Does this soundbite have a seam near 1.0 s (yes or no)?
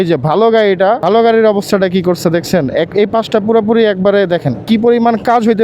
yes